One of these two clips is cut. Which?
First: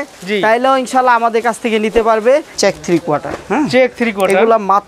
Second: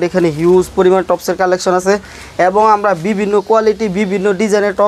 first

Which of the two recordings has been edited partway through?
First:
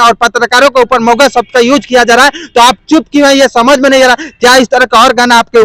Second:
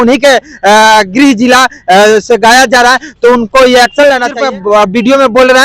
second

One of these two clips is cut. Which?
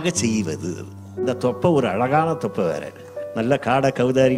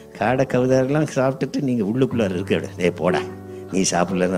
first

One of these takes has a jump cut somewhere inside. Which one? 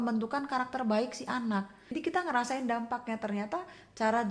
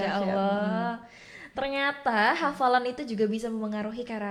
first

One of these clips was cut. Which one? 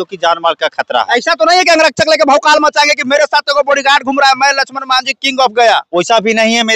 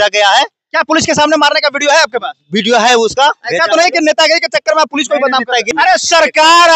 second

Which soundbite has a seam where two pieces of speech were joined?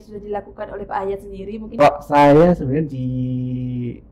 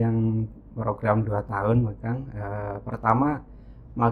first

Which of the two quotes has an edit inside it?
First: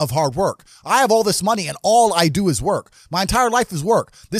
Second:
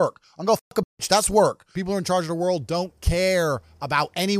second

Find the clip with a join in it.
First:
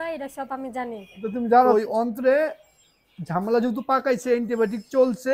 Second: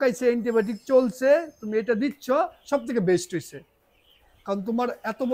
first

